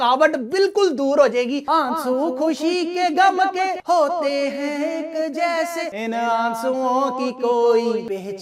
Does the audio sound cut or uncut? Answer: uncut